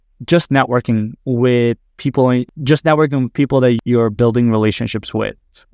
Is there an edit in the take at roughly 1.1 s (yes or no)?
no